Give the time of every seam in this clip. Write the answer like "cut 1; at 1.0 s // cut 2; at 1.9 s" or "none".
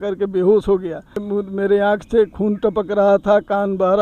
cut 1; at 1.2 s

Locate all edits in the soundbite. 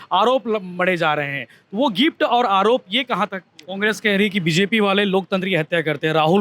cut 1; at 3.9 s

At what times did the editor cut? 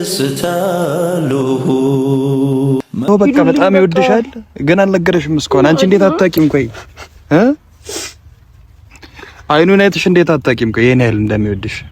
cut 1; at 3.1 s

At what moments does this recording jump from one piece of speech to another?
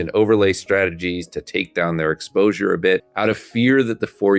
cut 1; at 3.1 s

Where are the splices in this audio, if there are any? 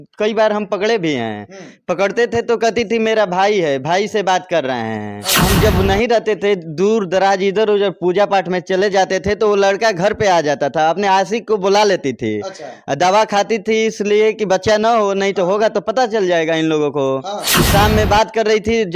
cut 1; at 5.4 s // cut 2; at 17.6 s

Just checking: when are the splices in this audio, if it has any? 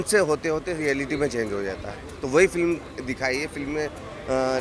none

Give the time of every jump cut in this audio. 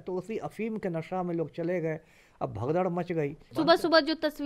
cut 1; at 3.5 s

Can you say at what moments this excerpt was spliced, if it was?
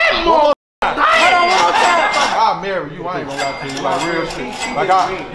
cut 1; at 2.3 s

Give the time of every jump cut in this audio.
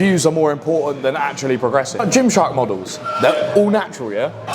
cut 1; at 2.0 s

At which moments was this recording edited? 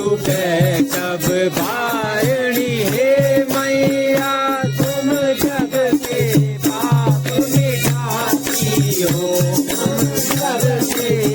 none

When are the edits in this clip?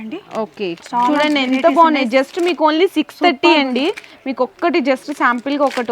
none

